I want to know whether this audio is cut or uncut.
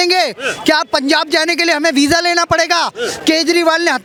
uncut